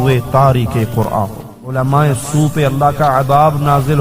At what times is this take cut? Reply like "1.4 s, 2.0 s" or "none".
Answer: 1.8 s